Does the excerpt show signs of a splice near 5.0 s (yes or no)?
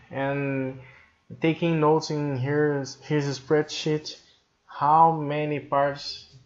no